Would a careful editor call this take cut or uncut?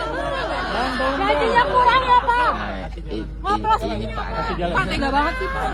uncut